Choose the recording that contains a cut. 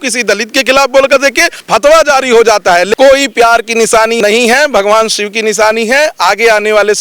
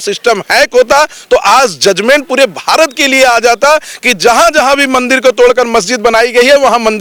first; 3 cuts; at 1.6 s, 2.9 s, 4.2 s

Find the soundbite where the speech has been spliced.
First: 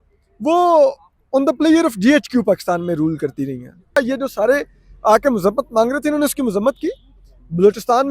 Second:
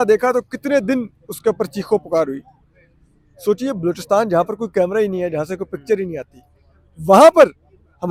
first; 1 cut; at 4.0 s

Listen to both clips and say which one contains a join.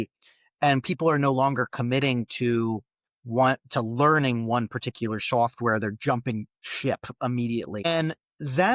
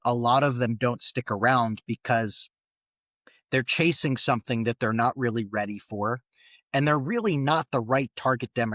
first; 1 cut; at 7.8 s

